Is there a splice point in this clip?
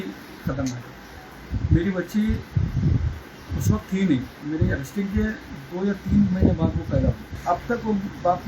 yes; 1 cut; at 7.3 s

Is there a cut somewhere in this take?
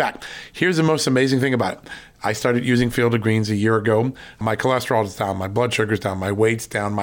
no; 0 cuts

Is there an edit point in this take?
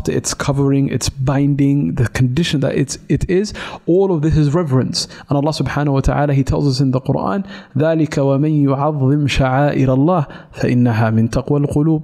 no; 0 cuts

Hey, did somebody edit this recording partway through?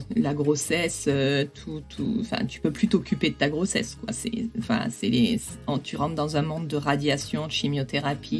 no; 0 cuts

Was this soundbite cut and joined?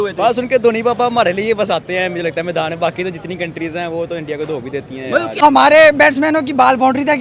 yes; 1 cut; at 5.4 s

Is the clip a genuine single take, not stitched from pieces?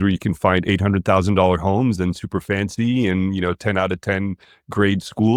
yes; 0 cuts

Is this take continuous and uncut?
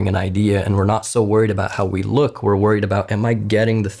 yes; 0 cuts

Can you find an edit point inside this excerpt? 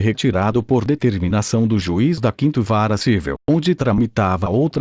no; 0 cuts

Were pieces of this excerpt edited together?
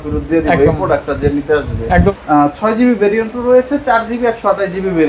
yes; 1 cut; at 2.1 s

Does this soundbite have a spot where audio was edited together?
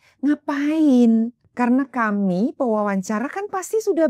yes; 1 cut; at 1.4 s

